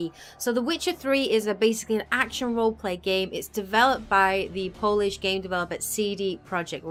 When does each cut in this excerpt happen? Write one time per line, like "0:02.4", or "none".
none